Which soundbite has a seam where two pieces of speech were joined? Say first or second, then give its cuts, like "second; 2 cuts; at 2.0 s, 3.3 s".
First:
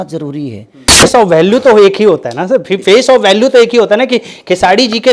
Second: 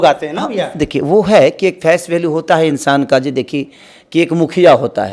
first; 1 cut; at 1.0 s